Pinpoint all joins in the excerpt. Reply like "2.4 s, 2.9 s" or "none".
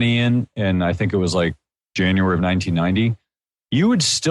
1.9 s